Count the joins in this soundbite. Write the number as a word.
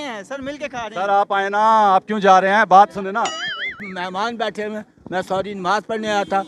one